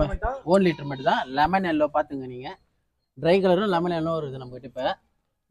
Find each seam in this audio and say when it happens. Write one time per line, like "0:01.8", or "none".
none